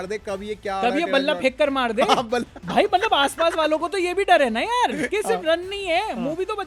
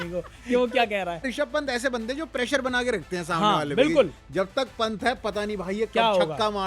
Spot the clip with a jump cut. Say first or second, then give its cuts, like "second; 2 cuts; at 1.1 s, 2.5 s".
second; 1 cut; at 1.3 s